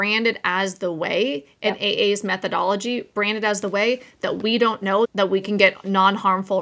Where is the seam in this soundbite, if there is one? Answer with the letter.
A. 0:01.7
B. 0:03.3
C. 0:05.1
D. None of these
C